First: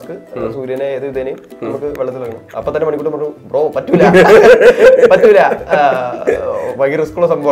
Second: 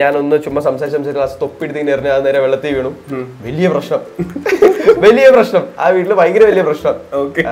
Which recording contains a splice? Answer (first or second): first